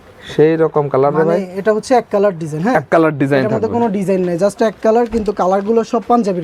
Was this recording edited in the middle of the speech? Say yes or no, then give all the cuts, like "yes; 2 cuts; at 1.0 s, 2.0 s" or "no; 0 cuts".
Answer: no; 0 cuts